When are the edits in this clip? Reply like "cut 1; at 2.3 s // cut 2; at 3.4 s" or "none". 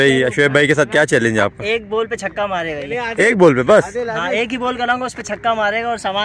none